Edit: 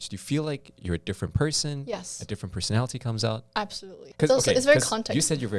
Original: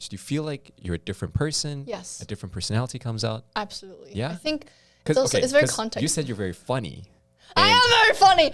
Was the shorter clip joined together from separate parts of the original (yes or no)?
yes